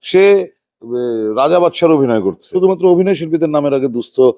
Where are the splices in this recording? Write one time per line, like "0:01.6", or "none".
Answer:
0:02.5

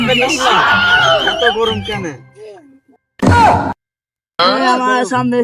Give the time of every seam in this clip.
0:04.4

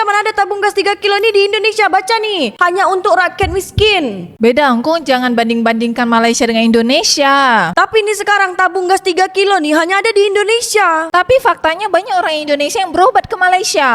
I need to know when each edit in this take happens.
0:04.3
0:11.1

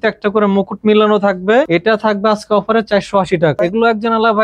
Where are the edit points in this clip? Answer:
0:01.7
0:03.6

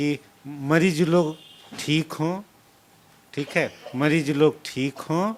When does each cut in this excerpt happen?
none

